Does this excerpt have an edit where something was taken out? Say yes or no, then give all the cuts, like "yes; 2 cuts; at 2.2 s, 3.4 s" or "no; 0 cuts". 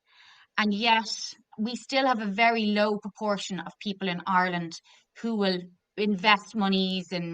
yes; 1 cut; at 1.5 s